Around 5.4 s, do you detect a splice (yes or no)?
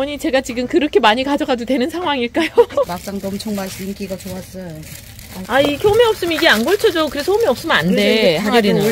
yes